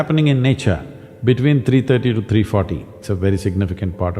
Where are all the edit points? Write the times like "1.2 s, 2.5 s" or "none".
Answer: 3.0 s

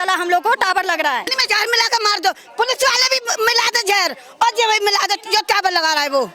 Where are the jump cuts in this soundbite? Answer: 1.4 s

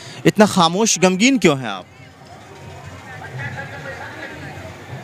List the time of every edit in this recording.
none

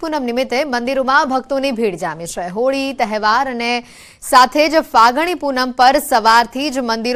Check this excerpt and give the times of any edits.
none

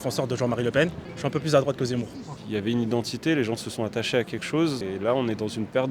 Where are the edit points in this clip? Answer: 1.1 s, 2.2 s, 4.8 s

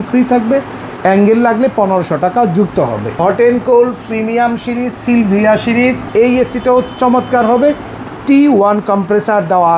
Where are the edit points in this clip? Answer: 3.0 s, 6.0 s

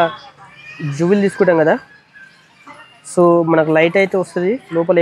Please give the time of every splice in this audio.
none

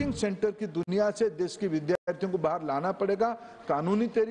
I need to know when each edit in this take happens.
none

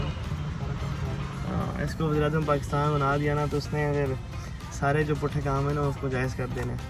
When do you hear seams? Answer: none

